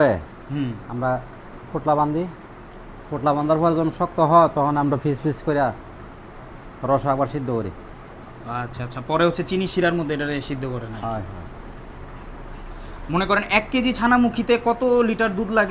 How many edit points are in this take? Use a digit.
0